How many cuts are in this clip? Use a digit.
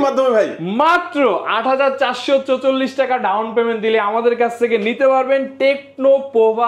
0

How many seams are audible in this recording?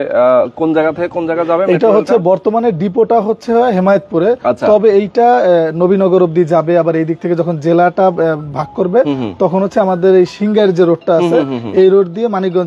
0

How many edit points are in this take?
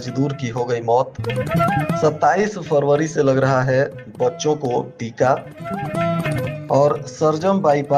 0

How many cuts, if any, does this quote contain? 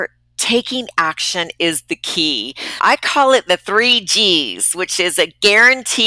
1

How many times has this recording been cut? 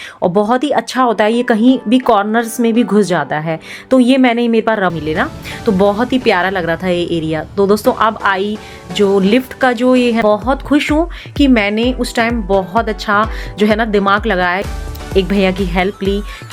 3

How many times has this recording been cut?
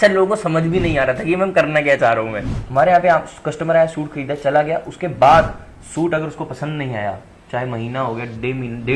1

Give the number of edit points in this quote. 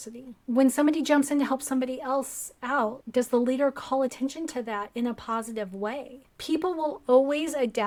0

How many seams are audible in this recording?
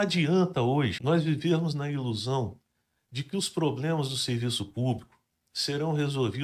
1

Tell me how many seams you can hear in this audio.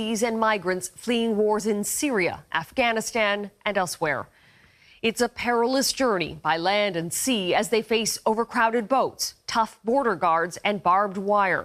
0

